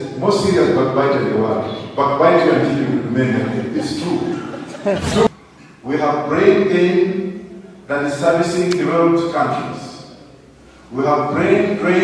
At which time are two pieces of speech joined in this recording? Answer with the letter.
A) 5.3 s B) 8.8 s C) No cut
A